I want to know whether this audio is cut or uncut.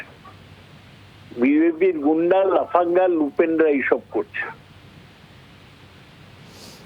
uncut